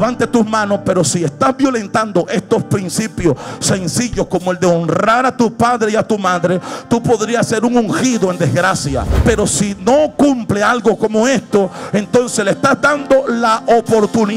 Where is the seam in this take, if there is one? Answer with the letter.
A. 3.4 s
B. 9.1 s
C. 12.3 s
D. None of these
B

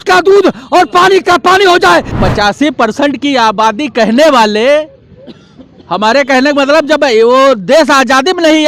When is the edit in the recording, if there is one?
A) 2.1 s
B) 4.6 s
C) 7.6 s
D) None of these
A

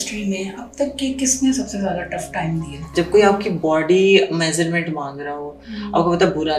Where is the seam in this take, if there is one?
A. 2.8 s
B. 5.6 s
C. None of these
A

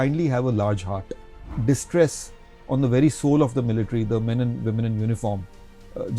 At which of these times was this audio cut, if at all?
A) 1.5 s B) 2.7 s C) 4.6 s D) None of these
A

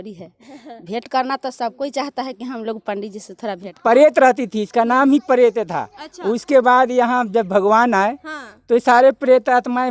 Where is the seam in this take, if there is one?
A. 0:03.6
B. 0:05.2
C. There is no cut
A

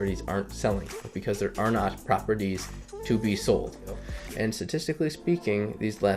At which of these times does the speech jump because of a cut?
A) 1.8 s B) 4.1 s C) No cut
B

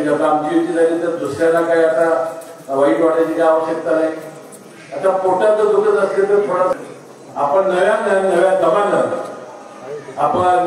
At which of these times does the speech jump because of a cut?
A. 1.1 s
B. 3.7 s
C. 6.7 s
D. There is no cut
C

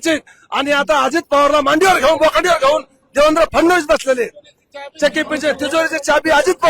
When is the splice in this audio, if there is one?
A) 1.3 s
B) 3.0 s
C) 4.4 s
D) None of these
D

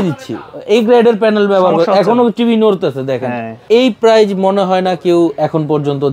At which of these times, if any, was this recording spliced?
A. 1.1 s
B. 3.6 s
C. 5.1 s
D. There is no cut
B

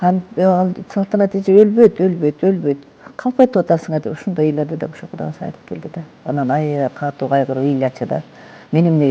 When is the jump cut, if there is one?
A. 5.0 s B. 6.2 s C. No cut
B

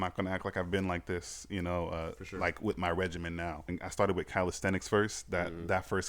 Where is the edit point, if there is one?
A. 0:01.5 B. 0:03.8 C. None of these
B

